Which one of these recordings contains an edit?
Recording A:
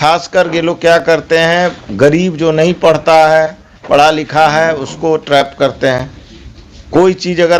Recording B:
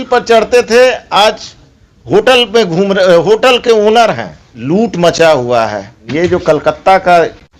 B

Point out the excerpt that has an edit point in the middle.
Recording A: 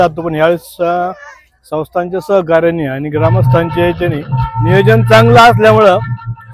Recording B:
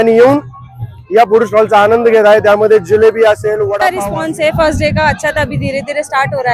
B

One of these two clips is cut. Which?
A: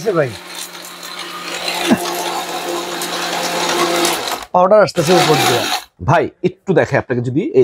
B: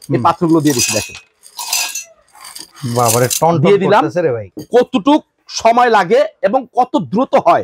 B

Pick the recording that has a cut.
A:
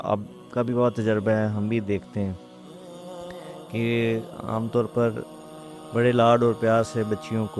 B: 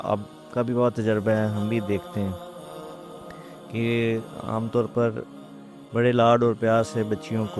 B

